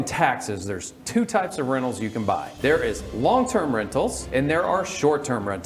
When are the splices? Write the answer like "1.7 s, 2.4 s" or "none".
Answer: 2.5 s, 4.2 s